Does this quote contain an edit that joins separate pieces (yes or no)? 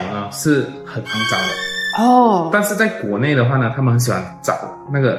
no